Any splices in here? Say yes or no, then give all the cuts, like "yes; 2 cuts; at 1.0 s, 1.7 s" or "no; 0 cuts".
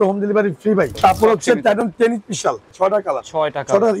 yes; 2 cuts; at 0.9 s, 2.7 s